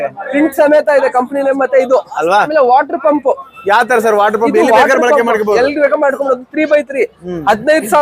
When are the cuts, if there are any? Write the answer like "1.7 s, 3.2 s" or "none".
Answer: 2.5 s